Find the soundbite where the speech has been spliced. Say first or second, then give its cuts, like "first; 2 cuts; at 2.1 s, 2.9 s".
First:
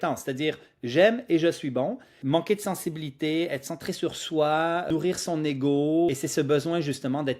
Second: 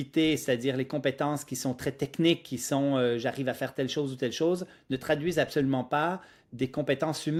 first; 3 cuts; at 2.1 s, 4.9 s, 6.1 s